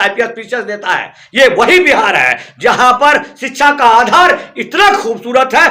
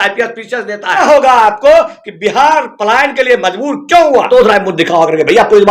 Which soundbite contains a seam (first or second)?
second